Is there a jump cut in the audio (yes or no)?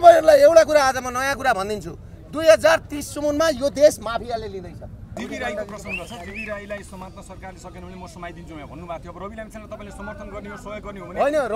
yes